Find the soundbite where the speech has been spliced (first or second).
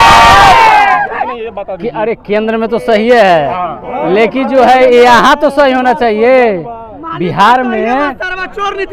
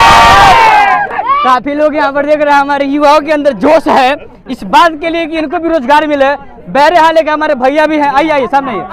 first